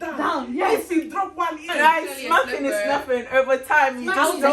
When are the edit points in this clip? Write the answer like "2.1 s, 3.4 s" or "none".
none